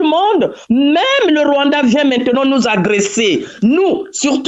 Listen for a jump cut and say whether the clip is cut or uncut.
uncut